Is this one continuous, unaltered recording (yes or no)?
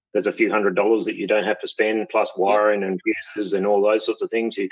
yes